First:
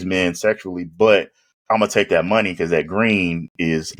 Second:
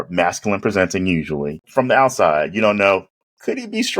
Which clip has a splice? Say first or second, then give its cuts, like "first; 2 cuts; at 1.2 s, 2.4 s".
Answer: second; 1 cut; at 1.6 s